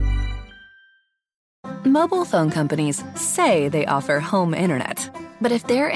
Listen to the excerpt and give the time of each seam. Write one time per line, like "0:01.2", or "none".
0:01.5